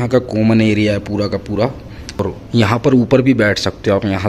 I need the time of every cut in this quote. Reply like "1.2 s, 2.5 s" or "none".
2.2 s